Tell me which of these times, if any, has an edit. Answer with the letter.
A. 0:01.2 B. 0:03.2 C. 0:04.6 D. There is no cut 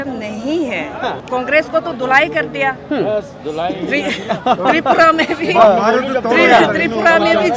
A